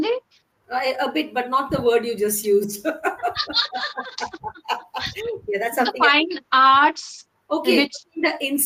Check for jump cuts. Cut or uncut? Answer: uncut